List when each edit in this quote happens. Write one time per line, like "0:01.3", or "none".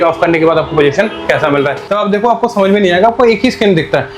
0:01.8